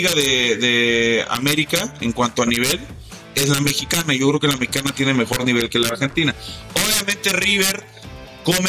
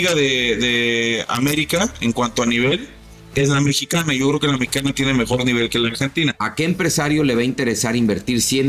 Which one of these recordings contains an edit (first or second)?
second